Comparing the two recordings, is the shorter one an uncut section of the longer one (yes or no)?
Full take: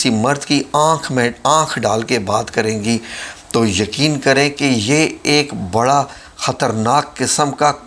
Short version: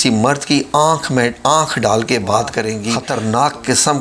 no